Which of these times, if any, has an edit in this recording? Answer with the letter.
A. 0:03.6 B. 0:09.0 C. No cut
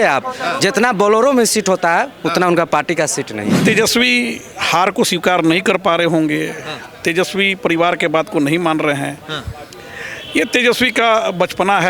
A